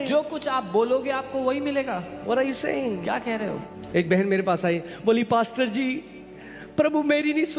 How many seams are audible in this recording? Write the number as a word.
one